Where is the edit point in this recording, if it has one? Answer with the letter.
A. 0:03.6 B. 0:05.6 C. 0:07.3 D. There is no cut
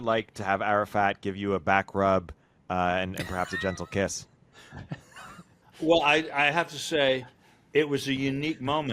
B